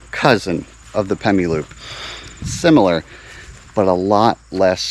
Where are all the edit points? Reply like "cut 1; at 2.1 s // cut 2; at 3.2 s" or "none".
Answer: cut 1; at 2.5 s